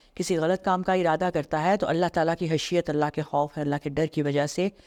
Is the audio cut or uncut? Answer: uncut